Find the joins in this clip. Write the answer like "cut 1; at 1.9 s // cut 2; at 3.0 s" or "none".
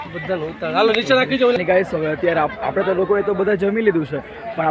cut 1; at 1.6 s

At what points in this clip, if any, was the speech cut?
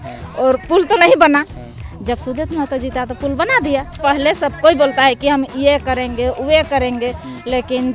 cut 1; at 4.0 s

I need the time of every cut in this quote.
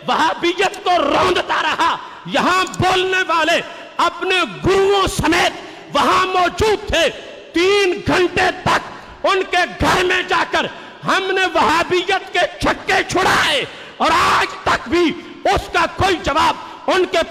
none

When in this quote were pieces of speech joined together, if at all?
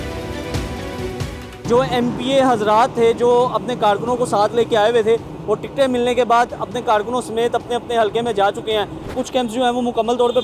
cut 1; at 1.5 s // cut 2; at 9.1 s

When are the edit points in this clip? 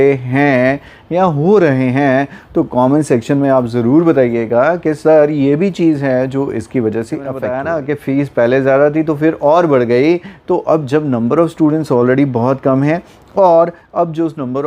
cut 1; at 7.4 s

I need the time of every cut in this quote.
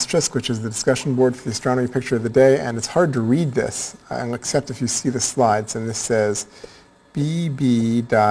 cut 1; at 5.9 s

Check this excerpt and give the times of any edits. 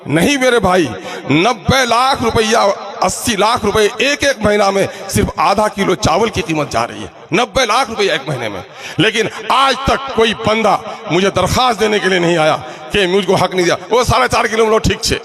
none

